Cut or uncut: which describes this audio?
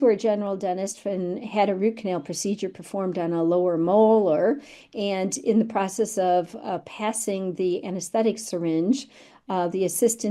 uncut